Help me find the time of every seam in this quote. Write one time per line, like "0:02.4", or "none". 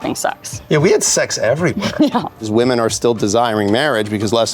0:02.5